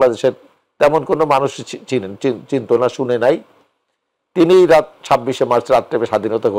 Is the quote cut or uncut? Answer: uncut